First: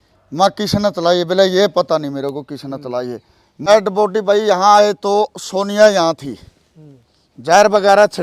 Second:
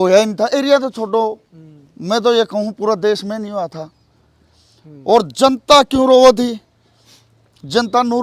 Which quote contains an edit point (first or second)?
first